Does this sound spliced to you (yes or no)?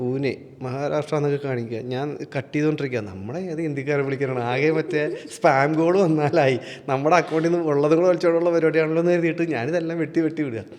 no